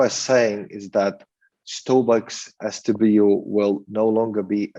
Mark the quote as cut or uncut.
uncut